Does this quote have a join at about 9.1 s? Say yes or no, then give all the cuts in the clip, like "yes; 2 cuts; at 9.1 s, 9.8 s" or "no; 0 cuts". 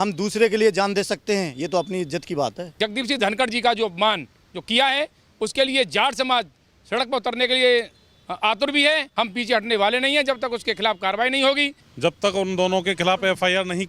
yes; 3 cuts; at 2.8 s, 9.1 s, 11.8 s